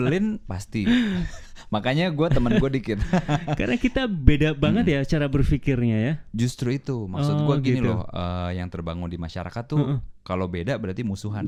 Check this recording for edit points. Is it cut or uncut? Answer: uncut